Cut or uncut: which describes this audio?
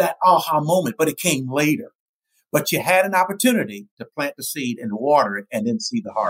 uncut